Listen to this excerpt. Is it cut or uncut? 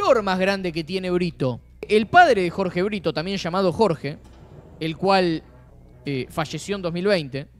cut